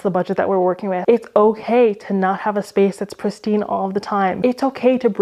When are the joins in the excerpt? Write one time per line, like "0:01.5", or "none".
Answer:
0:01.0
0:04.4